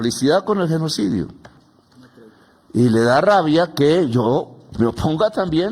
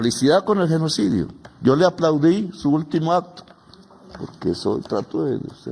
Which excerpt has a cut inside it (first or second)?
first